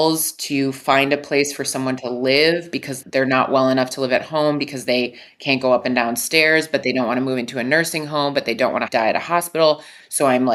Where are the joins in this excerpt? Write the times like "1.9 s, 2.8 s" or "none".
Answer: 3.0 s, 8.9 s